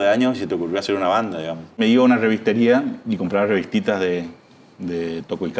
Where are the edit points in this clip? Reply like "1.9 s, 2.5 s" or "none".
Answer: 1.8 s